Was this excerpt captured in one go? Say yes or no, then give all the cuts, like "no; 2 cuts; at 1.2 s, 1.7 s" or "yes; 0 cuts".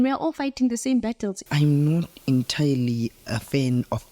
no; 1 cut; at 1.4 s